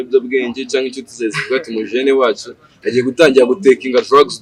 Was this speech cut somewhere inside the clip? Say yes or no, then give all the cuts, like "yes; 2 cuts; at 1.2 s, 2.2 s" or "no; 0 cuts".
no; 0 cuts